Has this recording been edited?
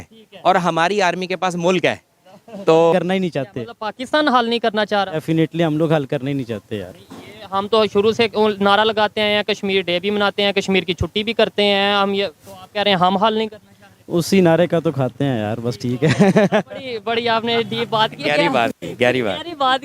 yes; 1 cut; at 2.9 s

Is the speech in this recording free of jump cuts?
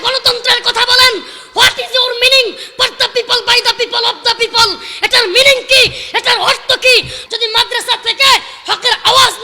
no; 1 cut; at 7.2 s

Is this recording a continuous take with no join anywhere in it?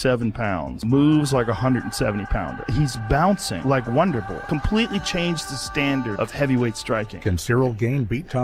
yes; 0 cuts

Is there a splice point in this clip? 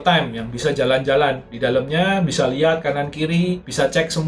no; 0 cuts

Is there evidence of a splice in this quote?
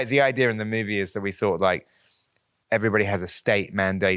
no; 0 cuts

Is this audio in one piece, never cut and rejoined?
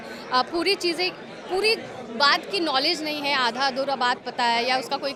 yes; 0 cuts

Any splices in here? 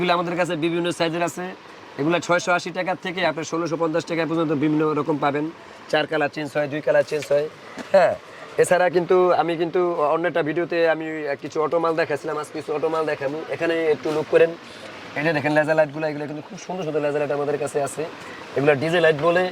no; 0 cuts

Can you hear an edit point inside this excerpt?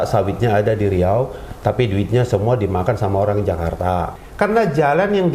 yes; 1 cut; at 4.1 s

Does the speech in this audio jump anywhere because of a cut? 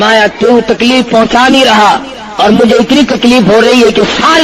no; 0 cuts

